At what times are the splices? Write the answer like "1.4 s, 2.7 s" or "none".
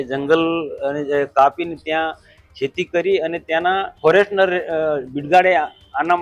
3.9 s